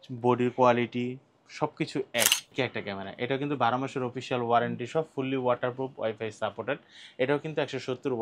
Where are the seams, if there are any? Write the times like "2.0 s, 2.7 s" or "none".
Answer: 2.5 s